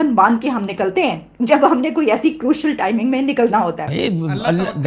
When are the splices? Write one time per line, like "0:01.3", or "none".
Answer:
0:03.8